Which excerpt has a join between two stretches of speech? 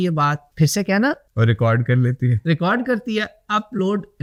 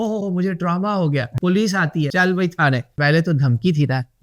second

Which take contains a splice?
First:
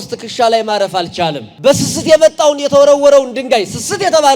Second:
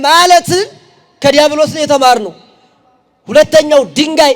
first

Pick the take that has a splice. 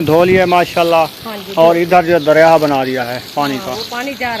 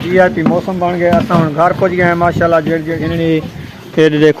second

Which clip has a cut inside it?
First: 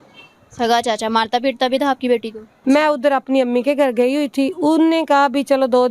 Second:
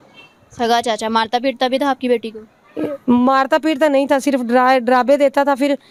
first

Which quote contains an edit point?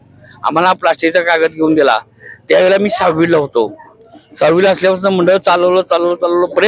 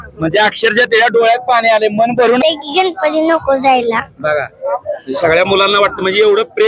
second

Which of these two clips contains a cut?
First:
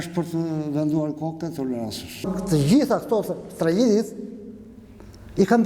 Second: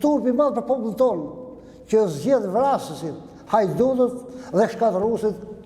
first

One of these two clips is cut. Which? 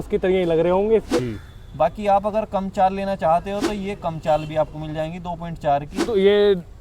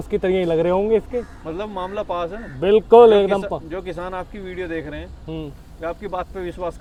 first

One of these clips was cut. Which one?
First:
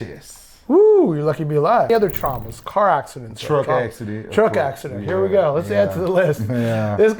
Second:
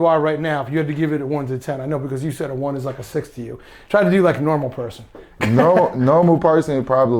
first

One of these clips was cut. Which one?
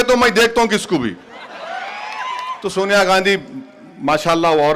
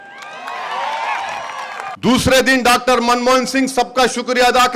second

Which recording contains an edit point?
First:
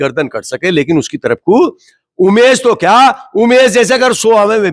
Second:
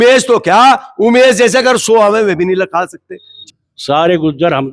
second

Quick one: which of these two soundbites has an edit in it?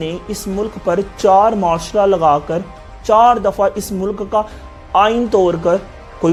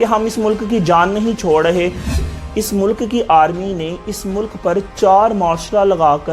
second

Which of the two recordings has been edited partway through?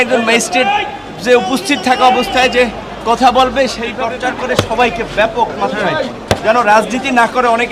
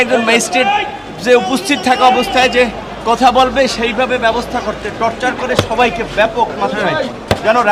first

